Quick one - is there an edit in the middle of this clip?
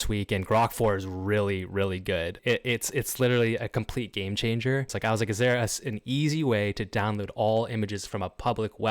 yes; 2 cuts; at 2.4 s, 4.9 s

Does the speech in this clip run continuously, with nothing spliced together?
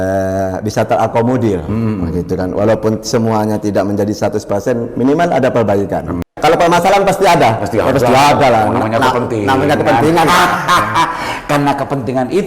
no; 1 cut; at 6.2 s

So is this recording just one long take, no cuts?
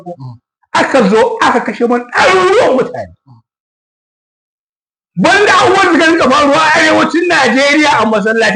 yes; 0 cuts

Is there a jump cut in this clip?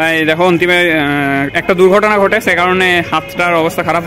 no; 0 cuts

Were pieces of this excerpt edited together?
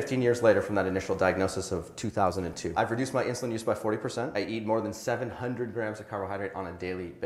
no; 0 cuts

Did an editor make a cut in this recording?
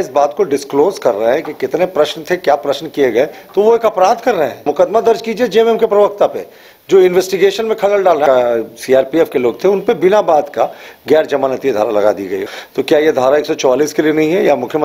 yes; 3 cuts; at 4.7 s, 8.2 s, 12.4 s

